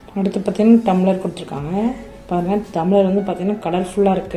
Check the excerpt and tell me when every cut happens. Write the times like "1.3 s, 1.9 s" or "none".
none